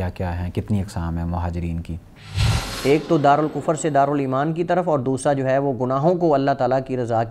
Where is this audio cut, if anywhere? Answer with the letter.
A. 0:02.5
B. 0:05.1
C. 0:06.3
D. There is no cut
A